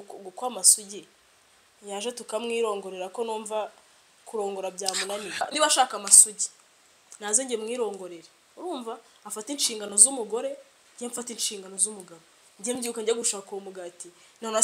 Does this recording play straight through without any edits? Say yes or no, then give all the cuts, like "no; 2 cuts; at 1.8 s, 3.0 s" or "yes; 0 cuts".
no; 1 cut; at 5.3 s